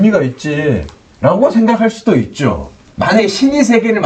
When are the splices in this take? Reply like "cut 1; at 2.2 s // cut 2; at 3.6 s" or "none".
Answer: cut 1; at 2.8 s